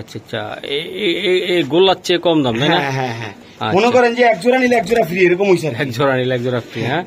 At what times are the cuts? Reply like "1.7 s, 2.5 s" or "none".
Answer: none